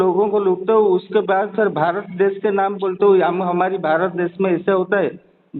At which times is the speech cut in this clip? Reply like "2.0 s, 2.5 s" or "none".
none